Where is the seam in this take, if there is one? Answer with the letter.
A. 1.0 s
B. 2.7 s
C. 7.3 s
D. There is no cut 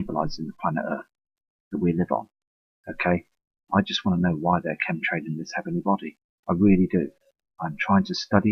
B